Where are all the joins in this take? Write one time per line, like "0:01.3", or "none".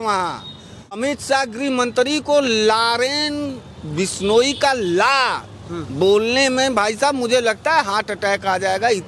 0:01.0